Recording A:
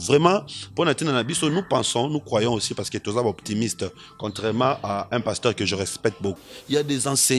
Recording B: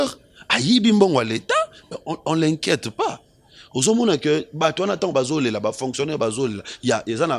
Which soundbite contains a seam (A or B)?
A